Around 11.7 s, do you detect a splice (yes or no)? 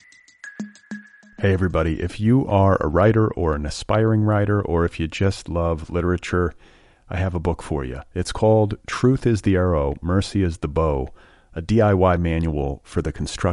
no